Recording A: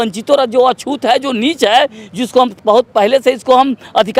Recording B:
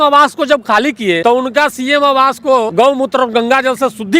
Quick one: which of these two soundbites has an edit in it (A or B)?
B